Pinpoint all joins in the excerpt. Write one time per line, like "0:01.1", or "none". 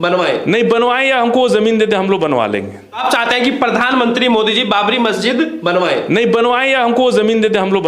0:03.0